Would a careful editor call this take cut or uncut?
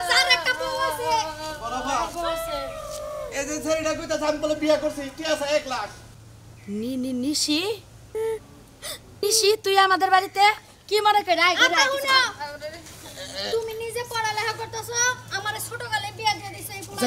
uncut